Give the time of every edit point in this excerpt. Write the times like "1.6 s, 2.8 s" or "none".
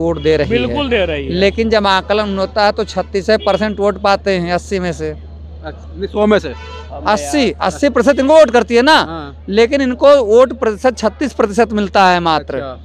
none